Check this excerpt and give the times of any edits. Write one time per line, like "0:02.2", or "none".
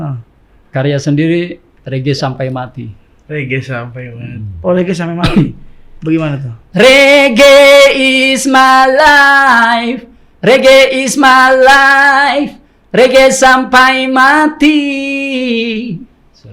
none